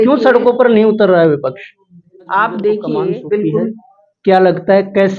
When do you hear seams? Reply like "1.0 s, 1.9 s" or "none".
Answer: 3.1 s